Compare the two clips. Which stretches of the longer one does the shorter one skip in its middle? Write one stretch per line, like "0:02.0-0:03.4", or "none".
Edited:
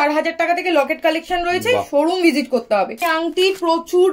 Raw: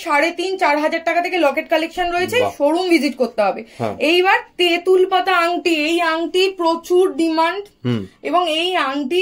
0:03.7-0:06.0